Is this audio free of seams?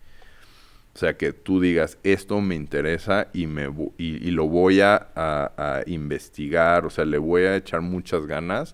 yes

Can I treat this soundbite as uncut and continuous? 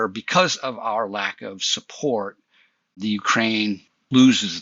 yes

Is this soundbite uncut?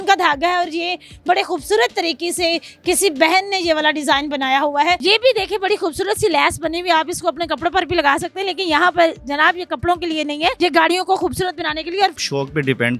no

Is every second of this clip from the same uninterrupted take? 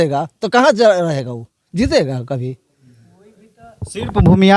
yes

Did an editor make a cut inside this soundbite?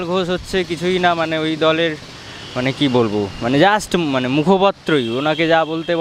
no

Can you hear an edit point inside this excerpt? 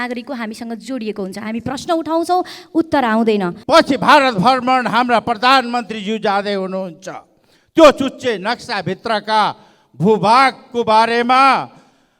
yes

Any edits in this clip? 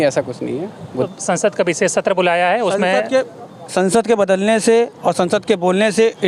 yes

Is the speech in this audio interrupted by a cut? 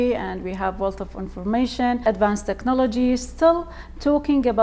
yes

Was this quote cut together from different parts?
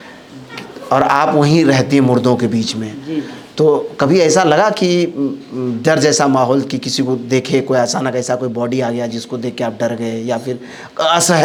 no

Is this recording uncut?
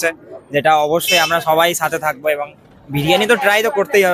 yes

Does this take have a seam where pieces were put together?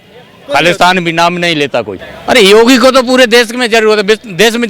yes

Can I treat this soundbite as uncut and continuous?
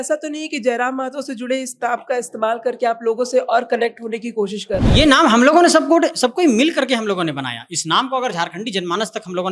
yes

